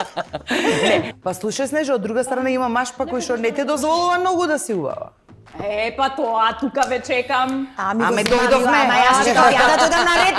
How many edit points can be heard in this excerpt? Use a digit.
1